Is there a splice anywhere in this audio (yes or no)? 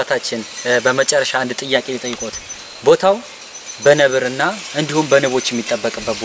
no